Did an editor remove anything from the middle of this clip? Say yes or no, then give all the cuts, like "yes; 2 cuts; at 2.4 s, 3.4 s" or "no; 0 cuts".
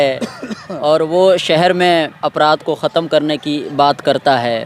no; 0 cuts